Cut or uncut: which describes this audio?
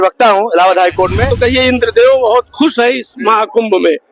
cut